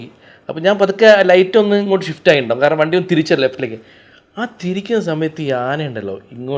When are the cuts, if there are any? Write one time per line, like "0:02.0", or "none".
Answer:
none